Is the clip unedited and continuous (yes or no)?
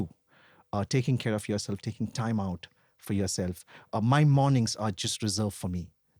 yes